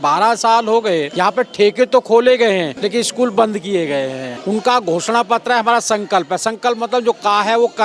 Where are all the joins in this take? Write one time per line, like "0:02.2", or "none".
0:01.1
0:02.7
0:04.3

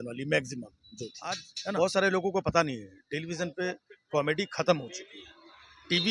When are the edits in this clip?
0:01.8

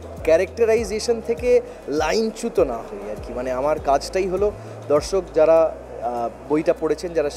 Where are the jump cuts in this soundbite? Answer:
none

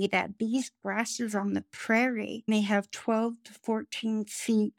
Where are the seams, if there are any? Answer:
none

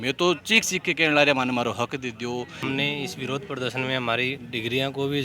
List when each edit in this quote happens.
0:02.6

